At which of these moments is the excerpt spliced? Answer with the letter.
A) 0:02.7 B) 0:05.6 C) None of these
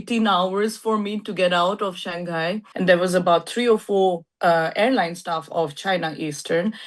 A